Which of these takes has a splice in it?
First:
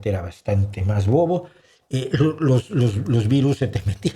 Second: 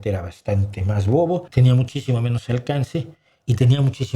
second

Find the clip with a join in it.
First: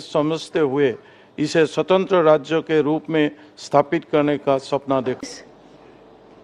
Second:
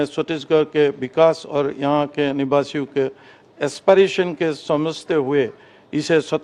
first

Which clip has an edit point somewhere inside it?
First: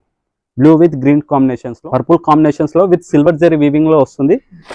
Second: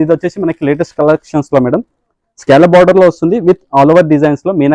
first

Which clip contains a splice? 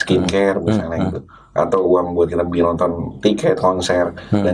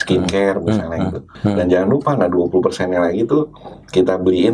second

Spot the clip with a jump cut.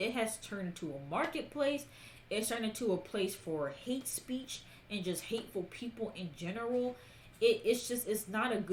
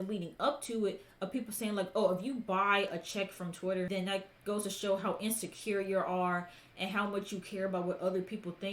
second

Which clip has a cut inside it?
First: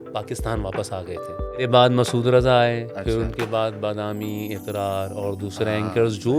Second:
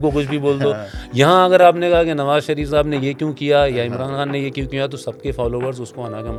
first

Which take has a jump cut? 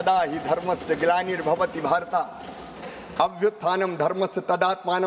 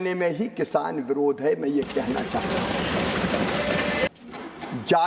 second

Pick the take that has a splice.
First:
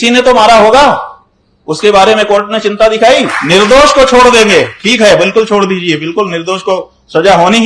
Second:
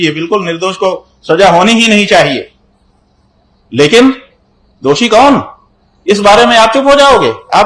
first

